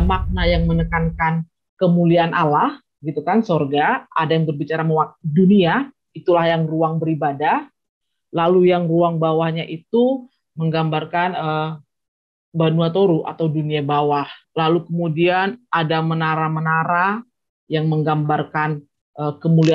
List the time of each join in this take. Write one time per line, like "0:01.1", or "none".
0:14.4